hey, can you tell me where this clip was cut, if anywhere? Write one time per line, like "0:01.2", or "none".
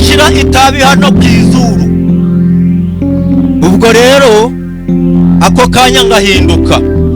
none